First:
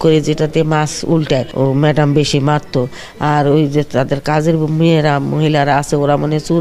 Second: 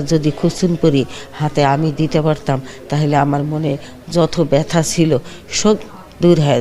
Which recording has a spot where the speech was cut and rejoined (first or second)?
first